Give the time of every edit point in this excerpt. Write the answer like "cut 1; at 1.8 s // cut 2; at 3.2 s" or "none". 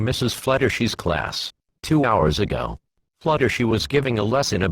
cut 1; at 1.3 s